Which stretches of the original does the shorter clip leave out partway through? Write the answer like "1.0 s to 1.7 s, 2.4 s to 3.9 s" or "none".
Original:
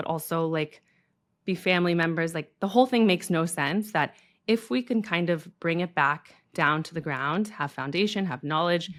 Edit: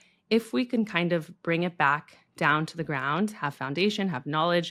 none